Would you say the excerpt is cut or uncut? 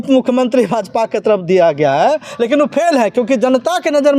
uncut